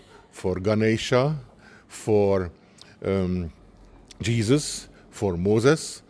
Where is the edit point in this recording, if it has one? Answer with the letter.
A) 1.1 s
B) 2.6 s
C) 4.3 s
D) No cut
D